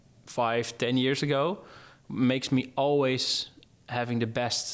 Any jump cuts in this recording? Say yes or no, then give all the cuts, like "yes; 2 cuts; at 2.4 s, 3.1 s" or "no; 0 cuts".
no; 0 cuts